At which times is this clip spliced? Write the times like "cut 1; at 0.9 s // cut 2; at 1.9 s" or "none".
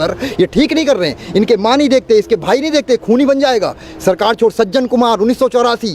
none